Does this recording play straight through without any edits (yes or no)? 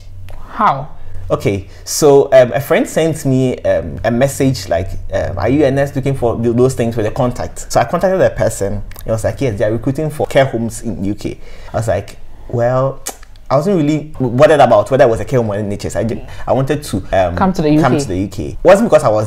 yes